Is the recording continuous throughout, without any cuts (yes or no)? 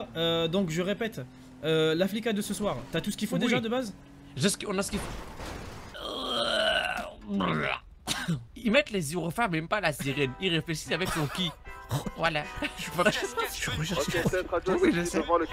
no